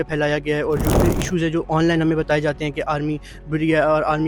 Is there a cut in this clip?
yes; 1 cut; at 0.9 s

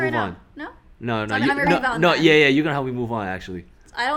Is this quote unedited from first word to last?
yes; 0 cuts

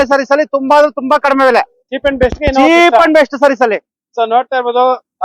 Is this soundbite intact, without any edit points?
yes; 0 cuts

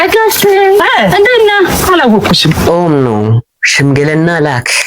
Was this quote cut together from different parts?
yes; 1 cut; at 2.6 s

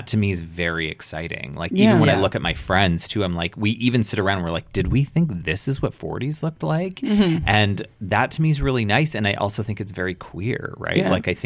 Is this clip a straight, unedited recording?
yes; 0 cuts

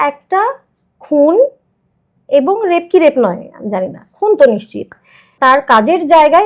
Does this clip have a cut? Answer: yes; 1 cut; at 5.3 s

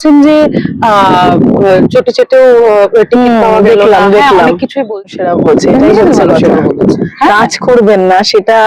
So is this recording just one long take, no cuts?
no; 1 cut; at 5.0 s

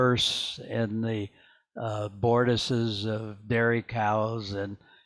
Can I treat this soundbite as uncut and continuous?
yes; 0 cuts

